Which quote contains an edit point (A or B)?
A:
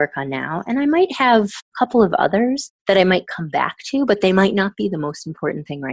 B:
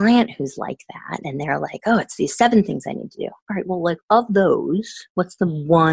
A